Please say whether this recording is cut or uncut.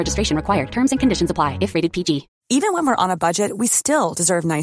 cut